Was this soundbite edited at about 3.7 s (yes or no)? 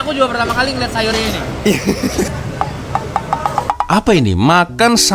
yes